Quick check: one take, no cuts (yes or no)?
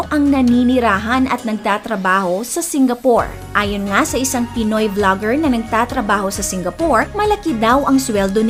yes